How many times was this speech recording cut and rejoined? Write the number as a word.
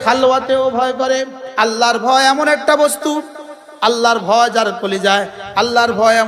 one